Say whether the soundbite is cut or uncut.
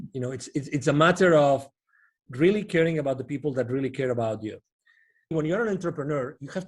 cut